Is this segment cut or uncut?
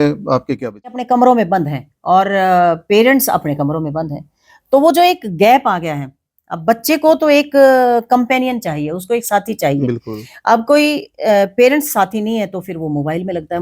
cut